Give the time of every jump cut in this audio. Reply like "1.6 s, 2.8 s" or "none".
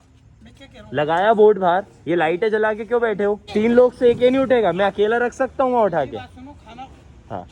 3.4 s